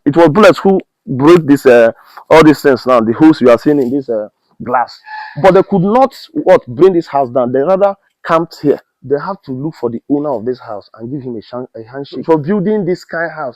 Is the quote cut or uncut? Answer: cut